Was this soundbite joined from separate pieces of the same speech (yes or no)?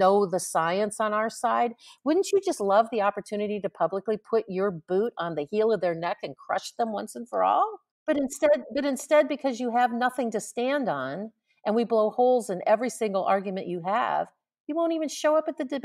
yes